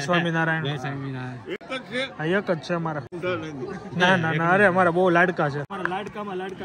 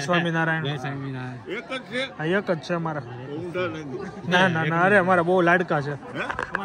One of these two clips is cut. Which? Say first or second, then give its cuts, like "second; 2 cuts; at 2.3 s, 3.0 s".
first; 2 cuts; at 3.1 s, 5.7 s